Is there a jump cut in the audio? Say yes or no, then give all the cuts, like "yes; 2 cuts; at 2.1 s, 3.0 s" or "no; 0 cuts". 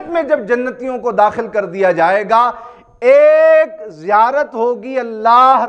no; 0 cuts